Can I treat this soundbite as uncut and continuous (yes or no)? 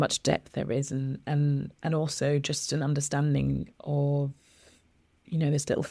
yes